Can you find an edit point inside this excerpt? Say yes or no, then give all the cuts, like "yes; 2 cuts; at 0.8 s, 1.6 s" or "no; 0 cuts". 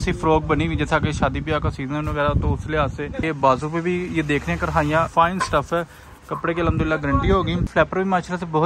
yes; 3 cuts; at 3.2 s, 5.1 s, 7.7 s